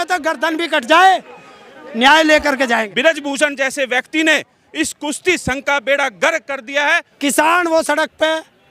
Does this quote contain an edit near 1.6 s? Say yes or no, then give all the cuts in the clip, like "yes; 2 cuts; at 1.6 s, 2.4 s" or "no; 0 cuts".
no; 2 cuts; at 2.9 s, 7.1 s